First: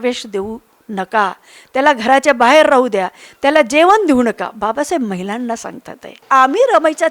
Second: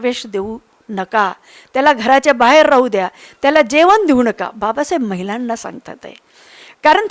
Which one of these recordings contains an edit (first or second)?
first